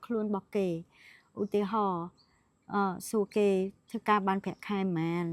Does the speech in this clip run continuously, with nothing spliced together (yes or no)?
yes